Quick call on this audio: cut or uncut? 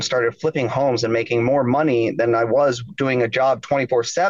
uncut